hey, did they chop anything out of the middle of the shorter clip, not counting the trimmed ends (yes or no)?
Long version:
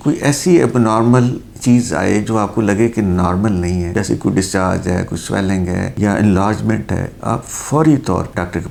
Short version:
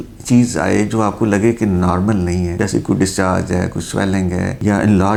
no